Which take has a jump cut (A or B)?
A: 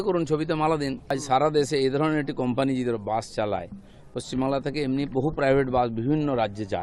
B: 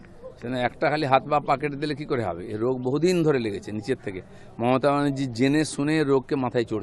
A